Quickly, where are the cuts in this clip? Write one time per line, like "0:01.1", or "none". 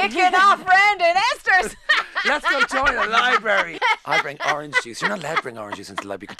none